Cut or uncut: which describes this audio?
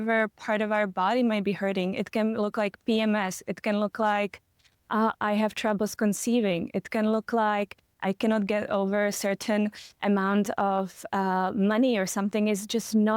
uncut